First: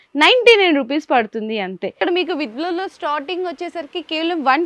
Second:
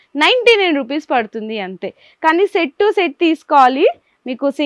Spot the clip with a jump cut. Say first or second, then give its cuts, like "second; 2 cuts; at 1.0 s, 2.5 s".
first; 1 cut; at 2.0 s